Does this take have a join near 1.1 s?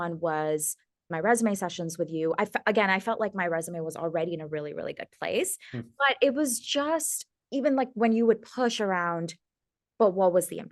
yes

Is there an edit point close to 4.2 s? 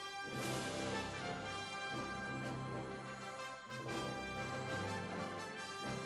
no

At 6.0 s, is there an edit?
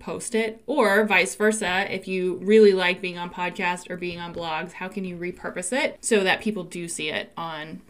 yes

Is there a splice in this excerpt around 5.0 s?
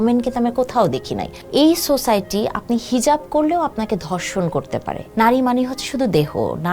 yes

